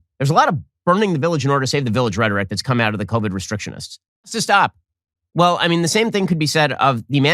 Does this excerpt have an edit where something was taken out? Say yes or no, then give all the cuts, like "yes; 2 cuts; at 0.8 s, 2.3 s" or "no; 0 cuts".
yes; 1 cut; at 4.3 s